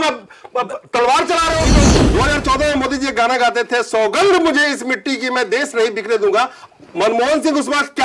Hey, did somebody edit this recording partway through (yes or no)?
yes